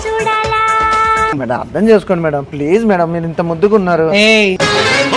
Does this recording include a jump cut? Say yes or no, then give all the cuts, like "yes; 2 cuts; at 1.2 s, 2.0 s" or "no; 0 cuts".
yes; 1 cut; at 1.3 s